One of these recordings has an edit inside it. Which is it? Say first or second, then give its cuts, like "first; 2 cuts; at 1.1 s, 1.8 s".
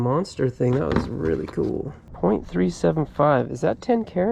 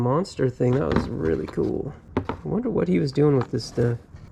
first; 1 cut; at 2.0 s